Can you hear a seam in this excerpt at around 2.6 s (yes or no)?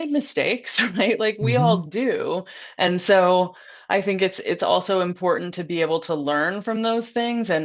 no